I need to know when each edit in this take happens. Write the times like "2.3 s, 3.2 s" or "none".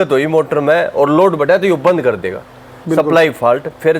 none